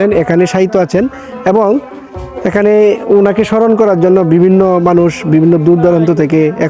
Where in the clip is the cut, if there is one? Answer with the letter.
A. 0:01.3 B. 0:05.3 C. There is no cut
C